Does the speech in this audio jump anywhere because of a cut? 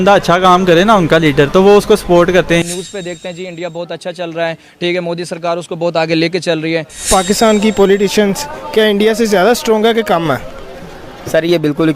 yes; 2 cuts; at 2.6 s, 7.1 s

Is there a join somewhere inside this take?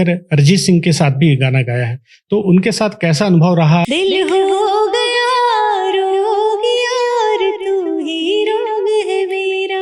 yes; 1 cut; at 3.9 s

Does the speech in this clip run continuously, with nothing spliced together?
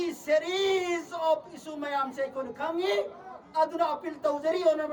yes; 0 cuts

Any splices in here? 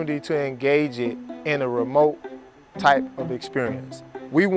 no; 0 cuts

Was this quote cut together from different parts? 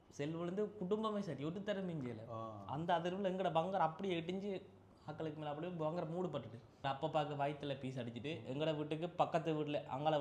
yes; 1 cut; at 6.8 s

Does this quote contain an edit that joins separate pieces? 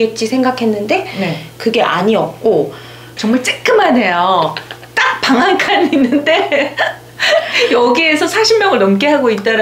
yes; 1 cut; at 3.1 s

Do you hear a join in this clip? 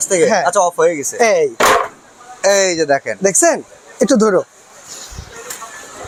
no; 0 cuts

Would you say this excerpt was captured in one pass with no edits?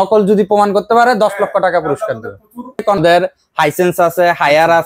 no; 1 cut; at 3.0 s

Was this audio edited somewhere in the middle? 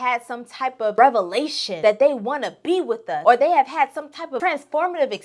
yes; 4 cuts; at 0.9 s, 1.6 s, 3.1 s, 4.3 s

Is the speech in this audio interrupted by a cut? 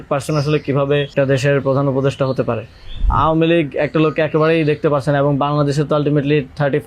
yes; 2 cuts; at 1.1 s, 3.1 s

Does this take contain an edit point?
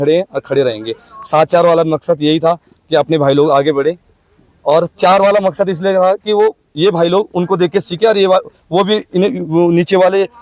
no; 0 cuts

